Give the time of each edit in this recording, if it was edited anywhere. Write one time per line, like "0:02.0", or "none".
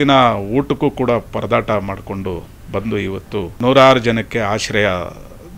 0:03.5